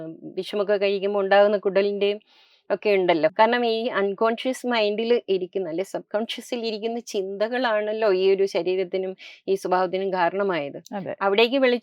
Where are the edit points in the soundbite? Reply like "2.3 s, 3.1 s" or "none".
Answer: 3.3 s